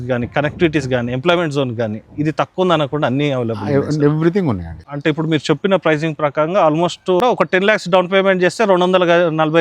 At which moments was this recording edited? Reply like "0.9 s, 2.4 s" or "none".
4.8 s, 7.2 s